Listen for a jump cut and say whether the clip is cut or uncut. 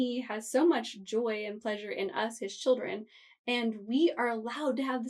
uncut